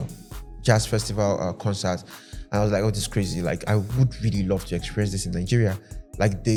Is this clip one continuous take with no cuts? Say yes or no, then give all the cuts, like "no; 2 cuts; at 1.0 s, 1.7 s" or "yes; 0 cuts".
yes; 0 cuts